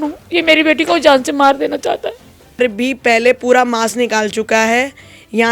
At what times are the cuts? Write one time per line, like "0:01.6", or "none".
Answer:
0:02.6

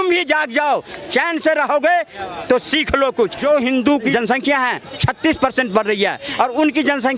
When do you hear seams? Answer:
0:03.4
0:04.5

